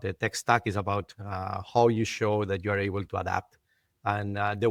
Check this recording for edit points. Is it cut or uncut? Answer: uncut